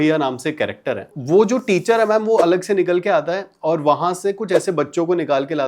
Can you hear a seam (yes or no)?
yes